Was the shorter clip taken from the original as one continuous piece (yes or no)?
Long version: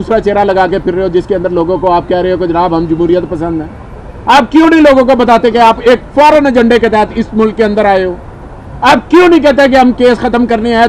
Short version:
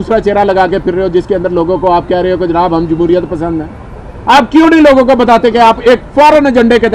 yes